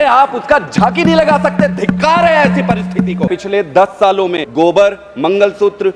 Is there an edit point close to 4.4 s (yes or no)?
yes